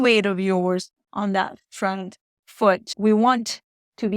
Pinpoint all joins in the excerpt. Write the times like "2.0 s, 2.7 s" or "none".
2.9 s

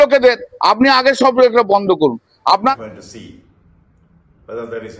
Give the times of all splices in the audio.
2.7 s

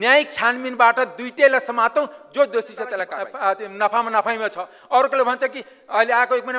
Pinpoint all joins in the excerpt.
3.1 s

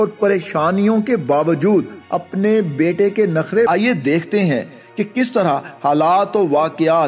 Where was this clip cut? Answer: 3.7 s

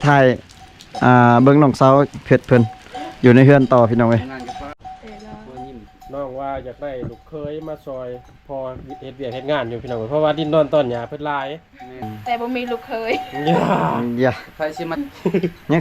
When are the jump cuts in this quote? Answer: 4.8 s, 12.1 s, 15.0 s

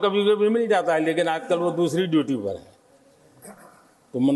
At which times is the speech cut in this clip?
none

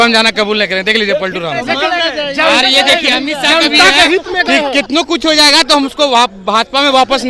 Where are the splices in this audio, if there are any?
none

